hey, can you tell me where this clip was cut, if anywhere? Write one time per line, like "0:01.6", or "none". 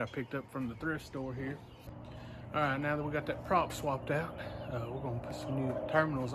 0:02.0